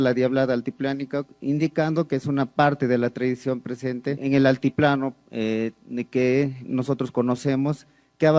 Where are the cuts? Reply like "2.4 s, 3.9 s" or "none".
1.3 s, 4.2 s